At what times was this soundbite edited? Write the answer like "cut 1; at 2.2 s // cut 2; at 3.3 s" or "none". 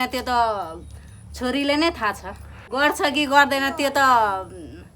cut 1; at 2.6 s

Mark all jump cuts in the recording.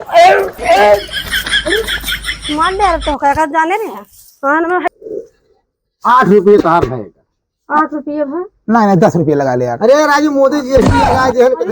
cut 1; at 4.9 s

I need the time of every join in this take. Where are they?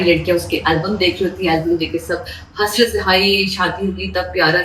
none

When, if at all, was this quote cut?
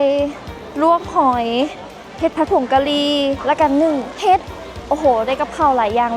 cut 1; at 3.4 s // cut 2; at 4.1 s

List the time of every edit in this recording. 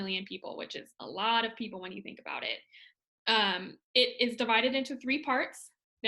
none

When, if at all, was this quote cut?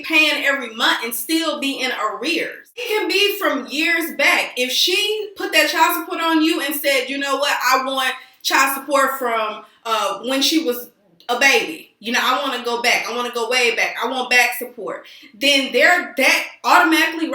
cut 1; at 2.9 s

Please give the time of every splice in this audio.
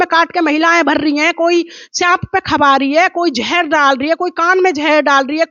none

